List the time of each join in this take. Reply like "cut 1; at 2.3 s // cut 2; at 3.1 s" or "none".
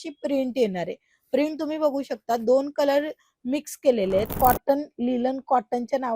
cut 1; at 4.3 s